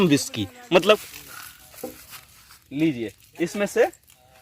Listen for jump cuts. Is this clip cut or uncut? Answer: cut